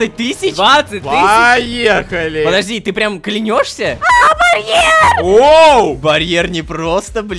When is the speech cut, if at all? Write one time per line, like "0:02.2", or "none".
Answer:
0:04.0
0:05.2
0:06.0